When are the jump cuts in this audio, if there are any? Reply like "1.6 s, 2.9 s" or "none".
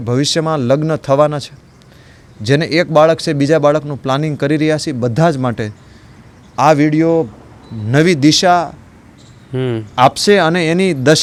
none